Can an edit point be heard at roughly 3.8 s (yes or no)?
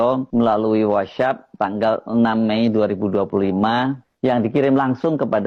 no